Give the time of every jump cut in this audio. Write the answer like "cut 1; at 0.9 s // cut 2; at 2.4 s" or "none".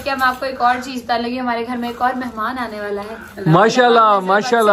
none